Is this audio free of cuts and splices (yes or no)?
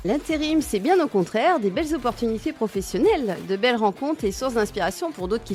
yes